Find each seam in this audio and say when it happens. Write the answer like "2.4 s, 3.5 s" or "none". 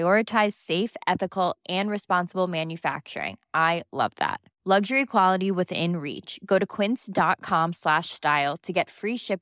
none